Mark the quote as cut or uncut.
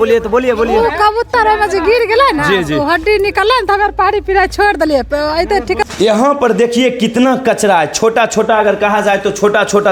cut